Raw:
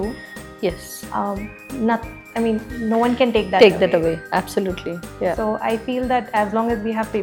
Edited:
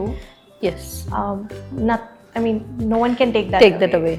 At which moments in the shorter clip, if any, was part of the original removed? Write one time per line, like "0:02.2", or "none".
none